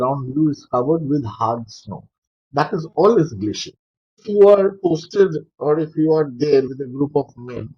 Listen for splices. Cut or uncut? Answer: cut